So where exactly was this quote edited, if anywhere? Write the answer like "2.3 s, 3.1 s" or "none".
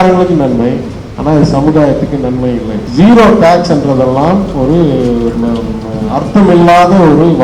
2.8 s